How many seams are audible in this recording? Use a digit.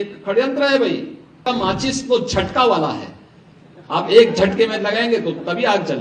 1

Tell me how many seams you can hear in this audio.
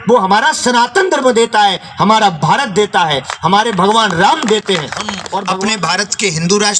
1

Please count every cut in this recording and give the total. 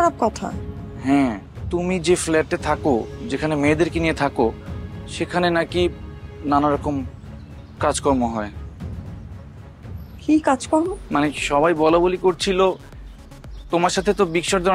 1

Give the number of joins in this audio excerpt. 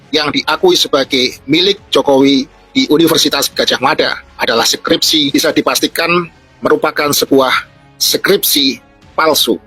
1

